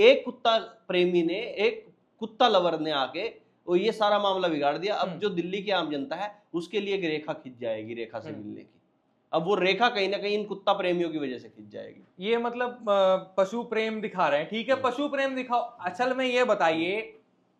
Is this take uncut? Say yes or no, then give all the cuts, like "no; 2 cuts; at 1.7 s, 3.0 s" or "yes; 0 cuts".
yes; 0 cuts